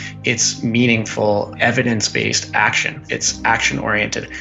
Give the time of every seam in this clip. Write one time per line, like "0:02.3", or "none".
0:01.5
0:02.9